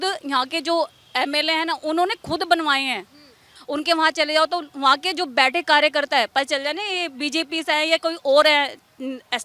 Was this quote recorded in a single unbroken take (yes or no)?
no